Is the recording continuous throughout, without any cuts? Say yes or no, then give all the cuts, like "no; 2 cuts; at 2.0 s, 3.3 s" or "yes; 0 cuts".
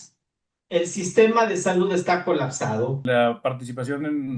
no; 1 cut; at 3.0 s